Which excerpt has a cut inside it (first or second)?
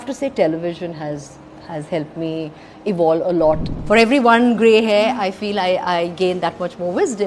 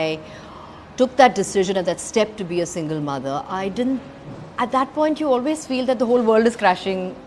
first